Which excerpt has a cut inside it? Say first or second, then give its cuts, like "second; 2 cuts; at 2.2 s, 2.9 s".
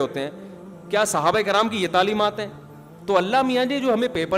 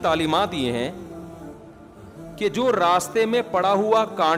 first; 1 cut; at 3.0 s